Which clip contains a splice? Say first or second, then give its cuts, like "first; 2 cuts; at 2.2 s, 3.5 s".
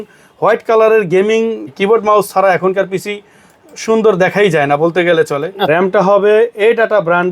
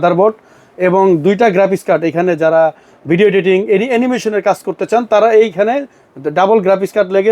first; 2 cuts; at 1.7 s, 5.6 s